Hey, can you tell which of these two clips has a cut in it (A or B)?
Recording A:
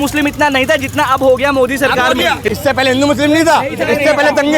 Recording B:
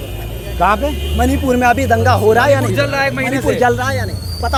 A